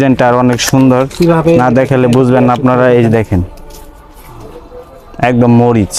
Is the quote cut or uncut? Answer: uncut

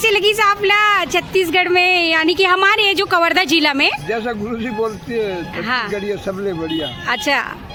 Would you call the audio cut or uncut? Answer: uncut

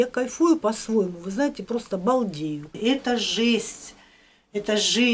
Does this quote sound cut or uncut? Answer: cut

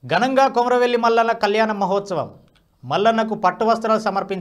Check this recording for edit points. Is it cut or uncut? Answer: uncut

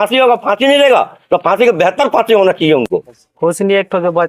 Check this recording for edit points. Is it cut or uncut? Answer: cut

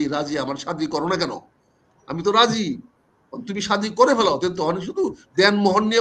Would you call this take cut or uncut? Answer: uncut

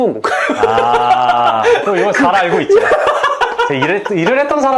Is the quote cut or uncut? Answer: uncut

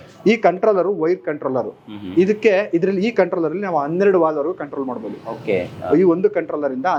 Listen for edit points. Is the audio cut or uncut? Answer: uncut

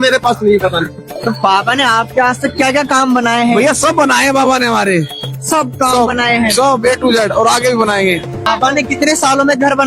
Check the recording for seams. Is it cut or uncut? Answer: cut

